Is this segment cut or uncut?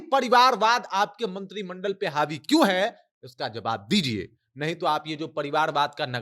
uncut